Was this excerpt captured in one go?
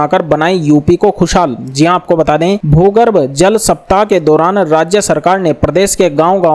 yes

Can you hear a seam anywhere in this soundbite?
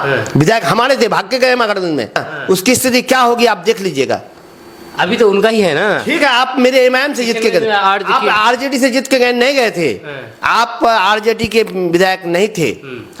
no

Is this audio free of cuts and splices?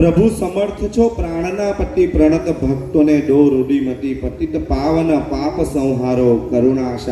yes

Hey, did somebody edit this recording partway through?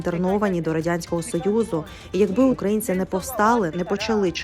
yes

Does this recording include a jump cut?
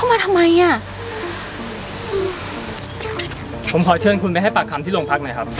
no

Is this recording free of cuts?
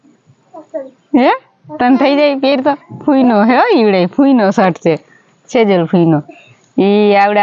yes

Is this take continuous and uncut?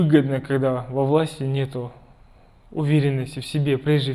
yes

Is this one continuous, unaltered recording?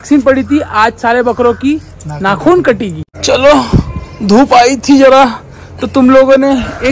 yes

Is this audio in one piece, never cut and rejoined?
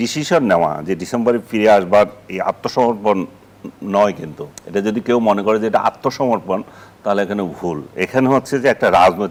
yes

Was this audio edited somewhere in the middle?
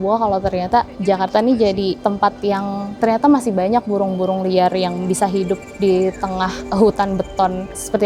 no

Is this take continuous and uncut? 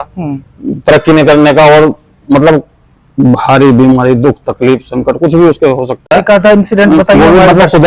yes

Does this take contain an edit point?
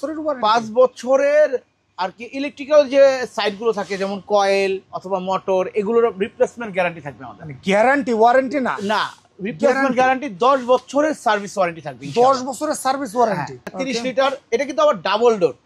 yes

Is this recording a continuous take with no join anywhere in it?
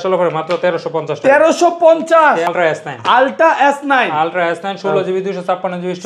no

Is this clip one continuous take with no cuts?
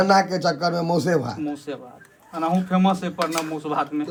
yes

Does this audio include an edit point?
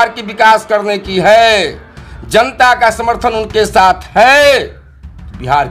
no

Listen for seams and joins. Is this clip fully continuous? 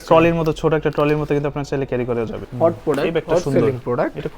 no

